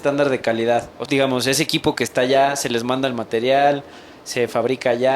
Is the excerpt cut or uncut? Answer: cut